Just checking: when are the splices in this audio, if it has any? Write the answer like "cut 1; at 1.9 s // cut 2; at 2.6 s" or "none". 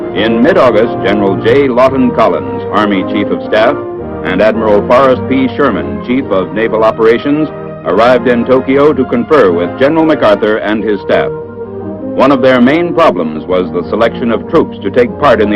cut 1; at 9.7 s